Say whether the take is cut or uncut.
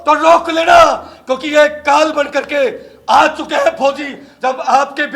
cut